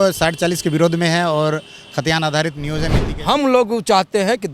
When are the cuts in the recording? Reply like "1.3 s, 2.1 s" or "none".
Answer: 3.1 s